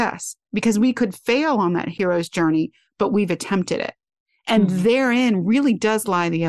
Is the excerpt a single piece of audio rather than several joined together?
yes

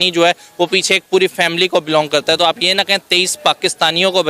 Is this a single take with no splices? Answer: yes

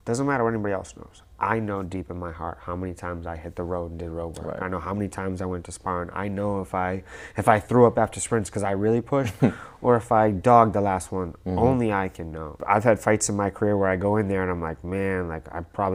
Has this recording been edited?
no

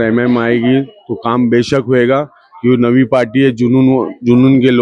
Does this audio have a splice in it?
no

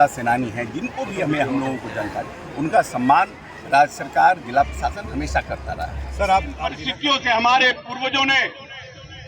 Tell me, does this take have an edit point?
yes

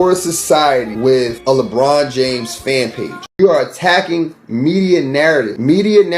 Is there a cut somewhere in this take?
yes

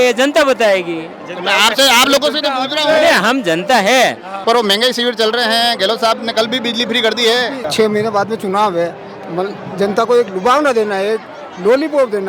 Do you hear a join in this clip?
yes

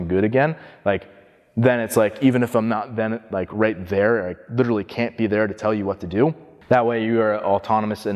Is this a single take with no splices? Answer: no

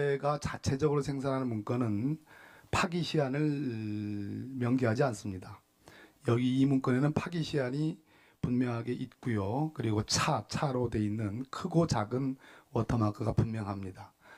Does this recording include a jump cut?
yes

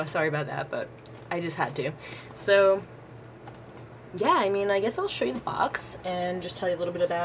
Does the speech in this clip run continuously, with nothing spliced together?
no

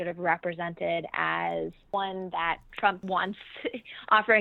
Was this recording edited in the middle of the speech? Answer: yes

